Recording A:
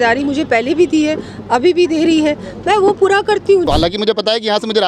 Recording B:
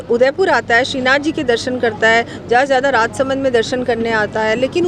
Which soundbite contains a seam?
A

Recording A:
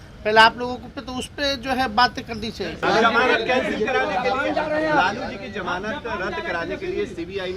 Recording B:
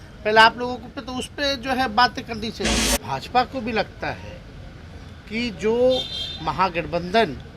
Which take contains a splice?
B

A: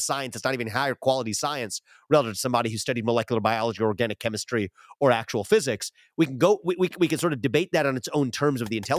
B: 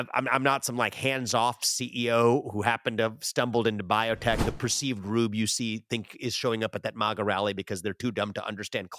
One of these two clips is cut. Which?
B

